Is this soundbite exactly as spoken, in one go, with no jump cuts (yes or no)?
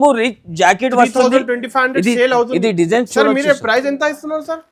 yes